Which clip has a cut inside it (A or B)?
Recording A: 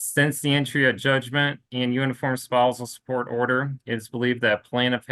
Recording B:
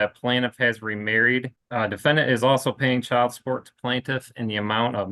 B